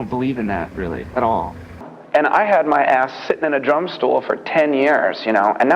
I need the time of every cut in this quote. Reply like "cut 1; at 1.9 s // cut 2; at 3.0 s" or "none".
cut 1; at 1.9 s